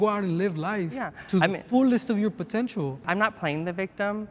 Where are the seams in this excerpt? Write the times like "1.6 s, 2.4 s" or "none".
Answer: 3.0 s